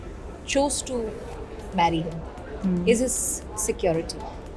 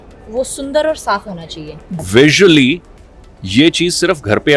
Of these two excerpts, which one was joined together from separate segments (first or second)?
second